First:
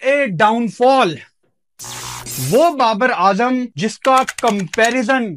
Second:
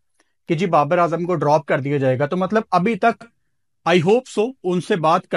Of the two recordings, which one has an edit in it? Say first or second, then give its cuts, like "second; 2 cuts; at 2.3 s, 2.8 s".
first; 1 cut; at 3.7 s